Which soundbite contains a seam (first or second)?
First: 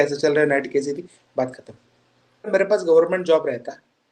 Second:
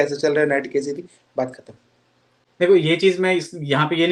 first